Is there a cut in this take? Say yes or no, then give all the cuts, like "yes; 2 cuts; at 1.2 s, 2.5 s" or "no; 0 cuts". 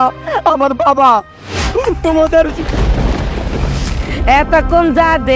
yes; 1 cut; at 3.9 s